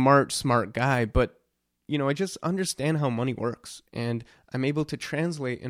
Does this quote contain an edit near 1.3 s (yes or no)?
no